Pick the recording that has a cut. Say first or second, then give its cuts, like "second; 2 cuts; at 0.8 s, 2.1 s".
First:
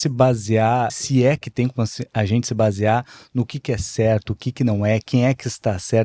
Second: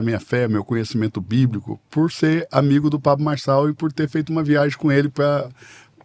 first; 1 cut; at 0.9 s